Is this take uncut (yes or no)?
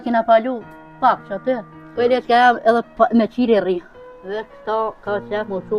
no